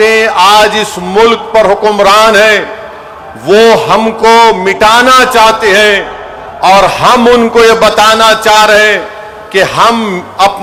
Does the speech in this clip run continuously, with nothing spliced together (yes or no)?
yes